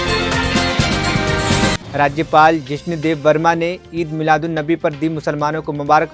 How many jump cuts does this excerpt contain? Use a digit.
1